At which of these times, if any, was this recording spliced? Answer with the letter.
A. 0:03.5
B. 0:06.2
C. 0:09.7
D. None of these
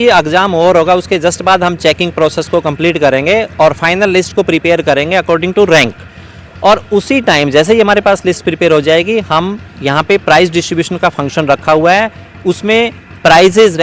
D